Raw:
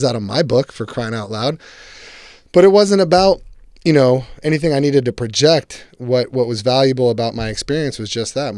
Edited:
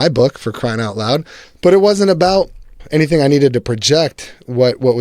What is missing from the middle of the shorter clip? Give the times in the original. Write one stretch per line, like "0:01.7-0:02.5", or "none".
0:01.7-0:02.3
0:03.7-0:04.3